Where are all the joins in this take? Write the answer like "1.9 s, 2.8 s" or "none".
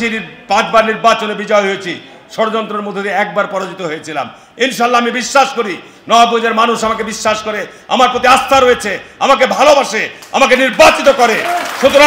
none